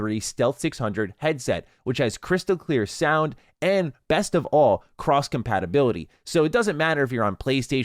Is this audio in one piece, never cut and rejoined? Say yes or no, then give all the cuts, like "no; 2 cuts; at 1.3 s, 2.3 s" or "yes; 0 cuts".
yes; 0 cuts